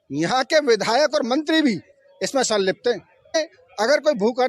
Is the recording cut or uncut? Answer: cut